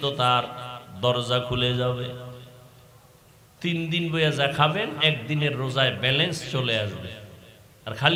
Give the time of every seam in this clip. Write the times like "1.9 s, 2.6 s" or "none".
none